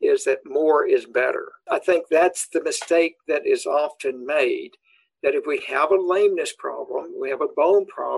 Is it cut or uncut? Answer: cut